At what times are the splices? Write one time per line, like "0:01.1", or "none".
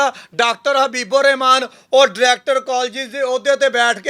none